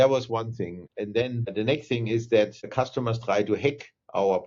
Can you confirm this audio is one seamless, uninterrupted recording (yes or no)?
no